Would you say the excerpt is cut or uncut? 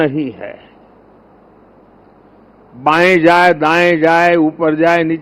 uncut